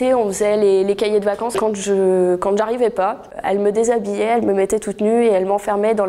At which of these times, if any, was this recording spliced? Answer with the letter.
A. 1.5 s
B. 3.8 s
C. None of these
A